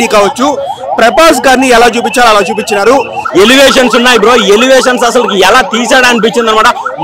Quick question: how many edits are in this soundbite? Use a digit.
1